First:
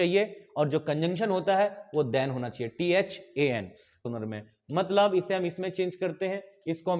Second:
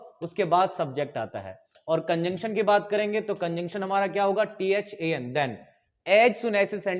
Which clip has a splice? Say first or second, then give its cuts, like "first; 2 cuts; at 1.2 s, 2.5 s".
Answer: first; 1 cut; at 4.0 s